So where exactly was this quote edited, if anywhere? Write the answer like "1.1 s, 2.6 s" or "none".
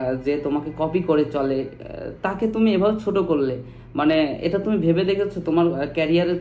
none